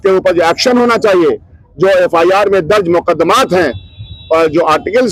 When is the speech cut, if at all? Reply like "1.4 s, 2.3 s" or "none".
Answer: none